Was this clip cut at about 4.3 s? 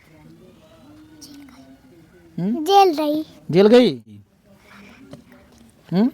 yes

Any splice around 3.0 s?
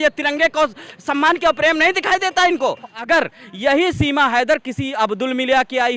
yes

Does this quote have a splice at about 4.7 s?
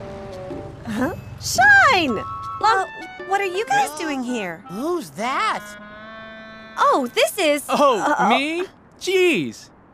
no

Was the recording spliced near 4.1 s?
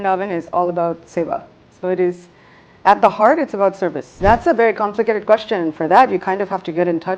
yes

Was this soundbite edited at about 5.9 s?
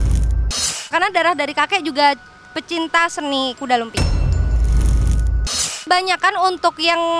yes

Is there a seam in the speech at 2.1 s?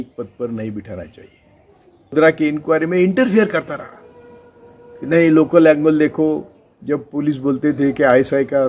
yes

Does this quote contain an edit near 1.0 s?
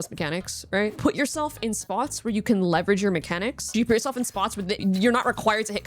yes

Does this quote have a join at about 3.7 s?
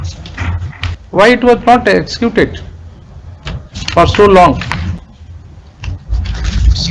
no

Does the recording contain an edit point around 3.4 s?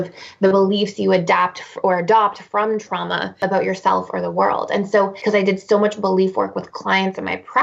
yes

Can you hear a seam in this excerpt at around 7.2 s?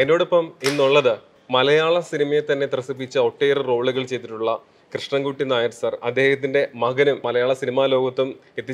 yes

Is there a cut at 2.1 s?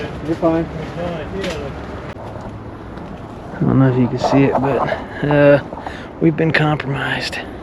yes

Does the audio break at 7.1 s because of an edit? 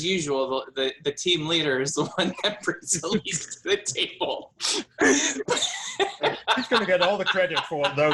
no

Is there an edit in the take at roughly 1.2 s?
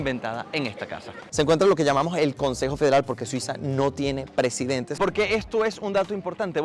yes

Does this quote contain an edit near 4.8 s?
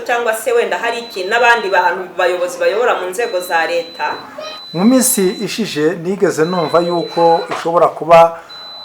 yes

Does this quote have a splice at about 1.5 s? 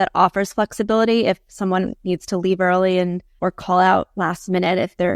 no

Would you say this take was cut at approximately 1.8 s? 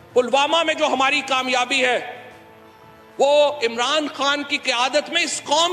no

